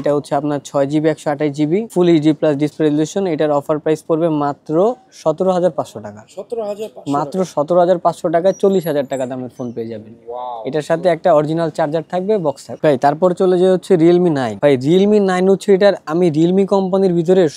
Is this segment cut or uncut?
uncut